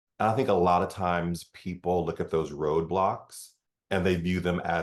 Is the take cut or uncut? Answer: uncut